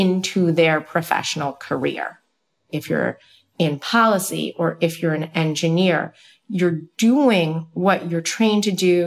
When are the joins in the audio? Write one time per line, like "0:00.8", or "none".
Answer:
0:02.7